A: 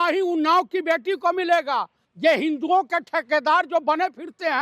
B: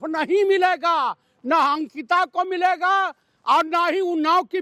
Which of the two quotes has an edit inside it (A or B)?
A